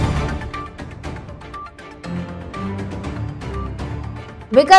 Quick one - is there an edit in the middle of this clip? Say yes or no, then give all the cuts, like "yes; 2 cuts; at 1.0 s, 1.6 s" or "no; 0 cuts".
no; 0 cuts